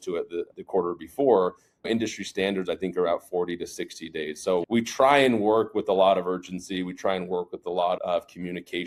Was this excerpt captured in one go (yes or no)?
yes